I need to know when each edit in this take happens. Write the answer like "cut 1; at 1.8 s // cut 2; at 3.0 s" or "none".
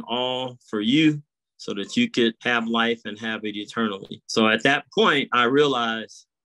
cut 1; at 2.4 s // cut 2; at 4.1 s